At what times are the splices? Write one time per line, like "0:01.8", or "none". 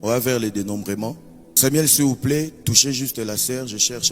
0:01.6